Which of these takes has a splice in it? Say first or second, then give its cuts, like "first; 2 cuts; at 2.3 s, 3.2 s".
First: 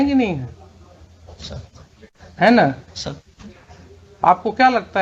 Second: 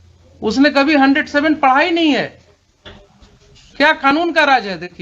second; 1 cut; at 3.6 s